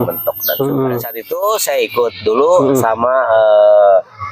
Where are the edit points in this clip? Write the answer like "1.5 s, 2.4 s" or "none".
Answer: 1.2 s